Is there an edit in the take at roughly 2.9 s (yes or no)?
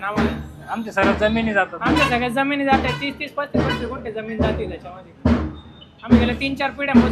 no